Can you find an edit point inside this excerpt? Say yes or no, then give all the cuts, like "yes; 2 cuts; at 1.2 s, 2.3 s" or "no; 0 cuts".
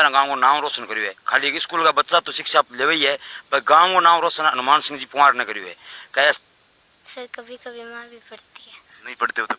yes; 1 cut; at 6.4 s